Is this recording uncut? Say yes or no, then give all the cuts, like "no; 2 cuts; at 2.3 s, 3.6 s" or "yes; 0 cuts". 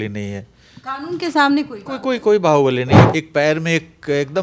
no; 1 cut; at 3.1 s